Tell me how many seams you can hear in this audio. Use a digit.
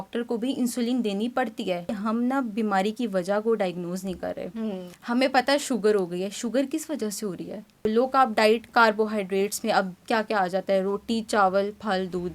3